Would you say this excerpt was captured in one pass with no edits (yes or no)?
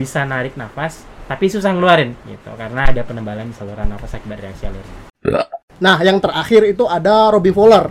no